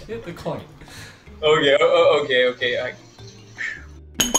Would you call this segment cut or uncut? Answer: uncut